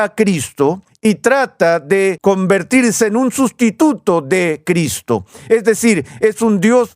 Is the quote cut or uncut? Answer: cut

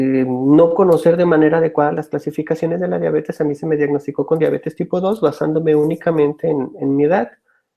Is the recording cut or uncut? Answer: uncut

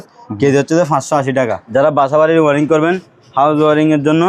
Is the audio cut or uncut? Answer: cut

